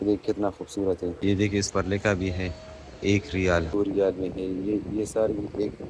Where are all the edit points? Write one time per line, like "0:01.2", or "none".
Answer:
0:01.2
0:03.7

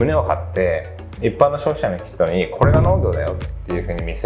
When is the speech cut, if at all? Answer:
none

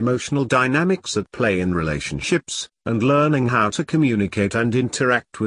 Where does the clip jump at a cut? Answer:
0:01.0

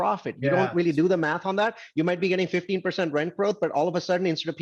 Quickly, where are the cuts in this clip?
none

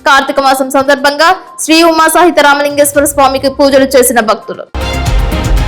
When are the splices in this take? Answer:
0:04.5

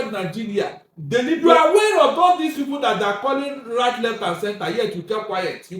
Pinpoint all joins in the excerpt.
0:01.4

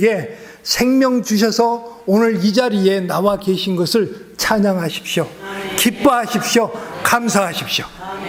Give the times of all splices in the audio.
none

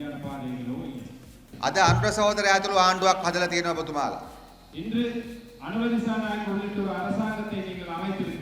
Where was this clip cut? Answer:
0:01.5

